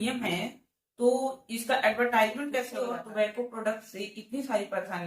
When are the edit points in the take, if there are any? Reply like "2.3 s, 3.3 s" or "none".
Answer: 2.7 s